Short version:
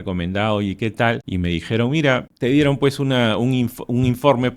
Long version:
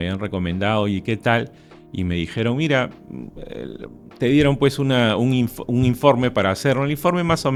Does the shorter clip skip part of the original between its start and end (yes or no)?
yes